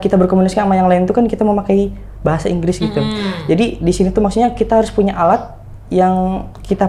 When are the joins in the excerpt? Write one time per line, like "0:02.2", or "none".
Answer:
none